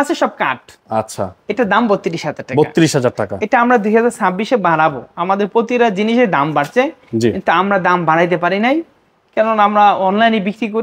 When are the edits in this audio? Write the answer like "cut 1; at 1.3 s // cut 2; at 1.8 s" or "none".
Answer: none